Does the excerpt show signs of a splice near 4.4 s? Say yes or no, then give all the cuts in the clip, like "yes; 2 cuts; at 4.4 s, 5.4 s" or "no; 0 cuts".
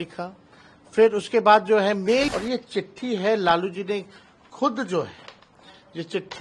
no; 1 cut; at 2.3 s